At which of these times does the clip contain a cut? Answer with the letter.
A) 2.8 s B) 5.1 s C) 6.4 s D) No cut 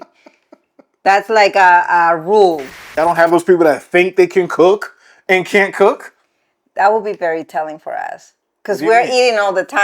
A